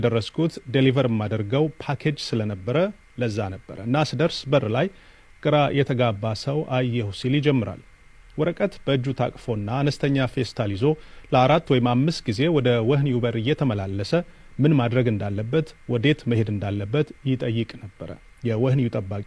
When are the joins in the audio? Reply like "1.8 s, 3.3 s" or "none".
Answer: none